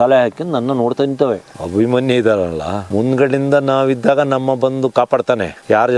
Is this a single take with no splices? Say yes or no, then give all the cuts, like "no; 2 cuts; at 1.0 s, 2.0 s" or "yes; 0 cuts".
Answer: no; 2 cuts; at 1.5 s, 2.8 s